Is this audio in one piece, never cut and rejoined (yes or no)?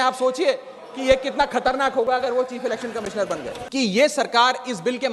no